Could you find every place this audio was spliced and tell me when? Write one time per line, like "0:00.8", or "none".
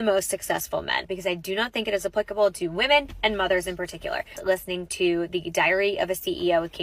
0:01.1
0:03.1
0:04.4